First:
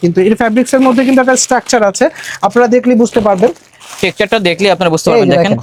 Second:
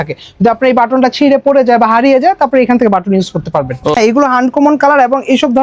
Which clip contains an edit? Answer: second; 1 cut; at 4.0 s

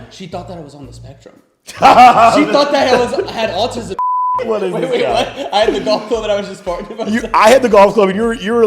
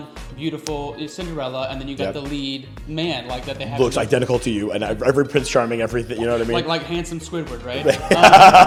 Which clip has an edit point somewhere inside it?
first; 1 cut; at 4.3 s

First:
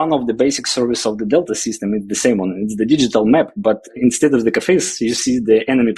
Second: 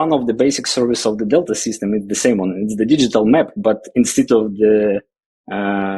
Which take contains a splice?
first; 1 cut; at 3.9 s

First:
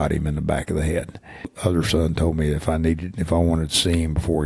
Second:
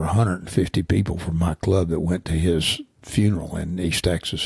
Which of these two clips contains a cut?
first; 1 cut; at 1.5 s

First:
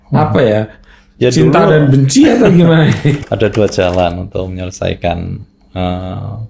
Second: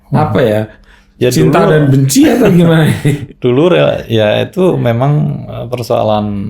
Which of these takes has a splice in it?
first; 1 cut; at 3.2 s

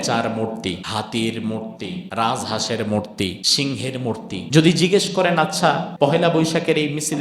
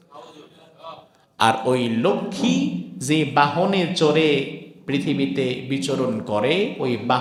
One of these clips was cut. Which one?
first; 5 cuts; at 0.8 s, 2.0 s, 3.4 s, 4.4 s, 5.9 s

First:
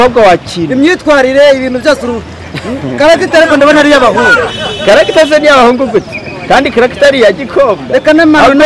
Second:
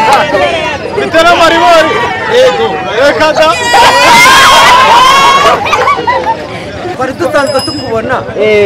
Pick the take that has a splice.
second; 1 cut; at 7.0 s

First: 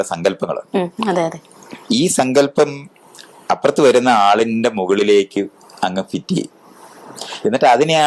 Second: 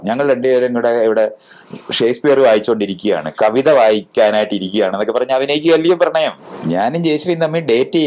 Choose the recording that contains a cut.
second; 1 cut; at 6.5 s

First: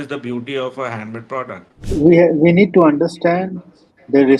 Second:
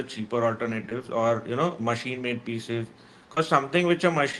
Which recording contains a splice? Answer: first; 1 cut; at 1.7 s

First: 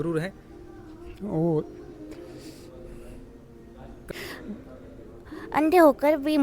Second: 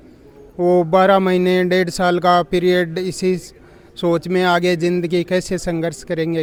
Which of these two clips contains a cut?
first; 1 cut; at 4.1 s

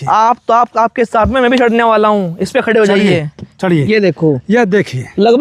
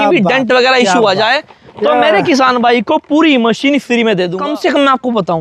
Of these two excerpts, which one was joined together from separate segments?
second; 1 cut; at 4.4 s

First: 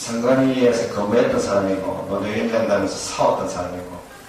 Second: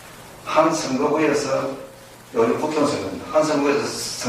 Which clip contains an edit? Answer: second; 1 cut; at 0.9 s

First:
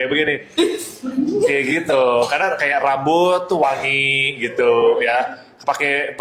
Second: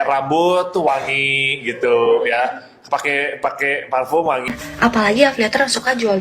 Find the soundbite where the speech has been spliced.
second; 1 cut; at 4.5 s

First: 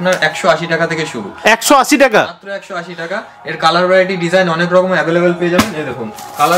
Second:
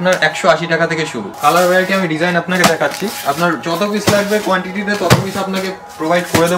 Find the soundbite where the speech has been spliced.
second; 1 cut; at 1.2 s

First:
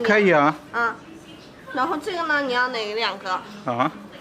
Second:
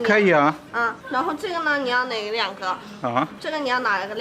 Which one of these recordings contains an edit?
second; 2 cuts; at 1.0 s, 3.4 s

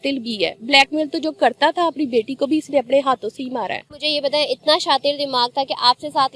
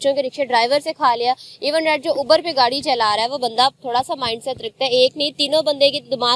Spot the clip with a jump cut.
first; 1 cut; at 4.0 s

